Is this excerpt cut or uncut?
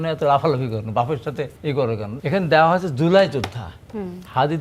cut